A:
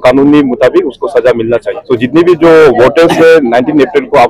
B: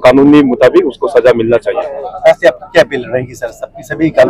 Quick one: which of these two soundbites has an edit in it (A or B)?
A